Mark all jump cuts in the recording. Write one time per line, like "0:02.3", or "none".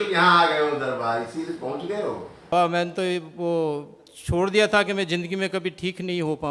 0:02.5